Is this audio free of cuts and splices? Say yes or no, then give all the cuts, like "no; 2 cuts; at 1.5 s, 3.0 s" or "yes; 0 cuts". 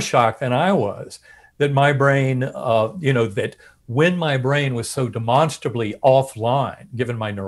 yes; 0 cuts